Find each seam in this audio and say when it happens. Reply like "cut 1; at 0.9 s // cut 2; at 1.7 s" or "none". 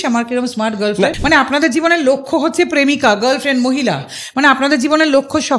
cut 1; at 1.2 s